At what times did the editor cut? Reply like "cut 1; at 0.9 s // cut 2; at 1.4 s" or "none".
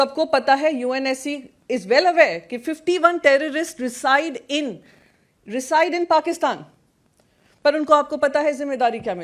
none

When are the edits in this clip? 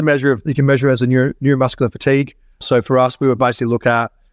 cut 1; at 2.6 s

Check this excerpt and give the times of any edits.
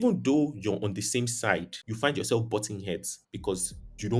cut 1; at 1.8 s

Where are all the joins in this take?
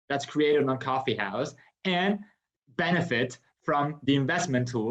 none

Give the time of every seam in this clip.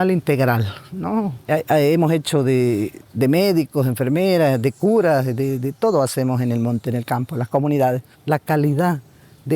cut 1; at 1.4 s // cut 2; at 3.0 s // cut 3; at 8.1 s

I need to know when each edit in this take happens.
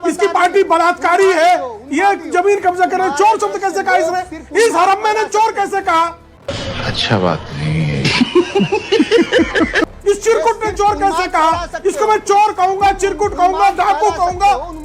none

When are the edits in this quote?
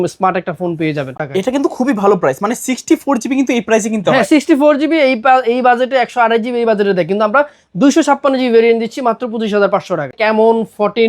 cut 1; at 1.2 s // cut 2; at 10.2 s

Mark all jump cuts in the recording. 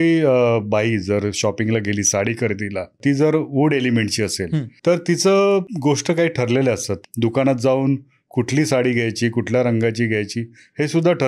cut 1; at 3.0 s // cut 2; at 4.7 s // cut 3; at 5.7 s // cut 4; at 7.0 s

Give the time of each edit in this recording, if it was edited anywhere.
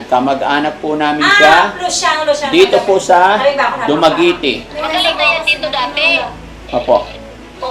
cut 1; at 4.7 s

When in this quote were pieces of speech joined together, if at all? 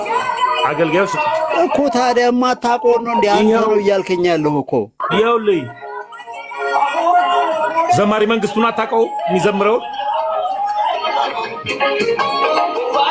none

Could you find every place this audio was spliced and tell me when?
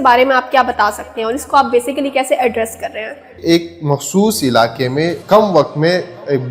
cut 1; at 3.4 s // cut 2; at 5.2 s

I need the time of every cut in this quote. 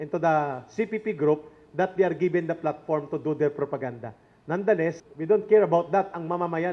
cut 1; at 5.1 s

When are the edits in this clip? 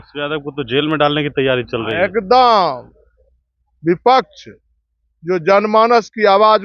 none

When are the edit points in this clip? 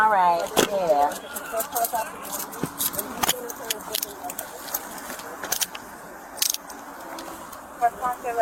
none

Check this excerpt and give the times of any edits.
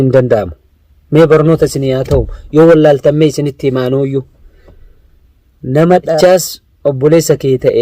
cut 1; at 6.2 s

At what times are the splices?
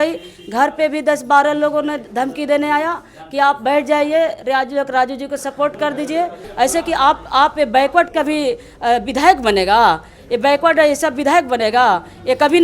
cut 1; at 6.4 s

